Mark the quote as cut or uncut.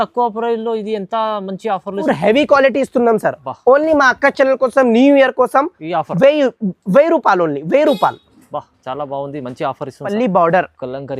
cut